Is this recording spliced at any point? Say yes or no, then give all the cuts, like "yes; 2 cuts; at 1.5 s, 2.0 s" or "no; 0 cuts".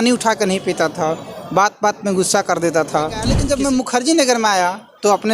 yes; 1 cut; at 3.3 s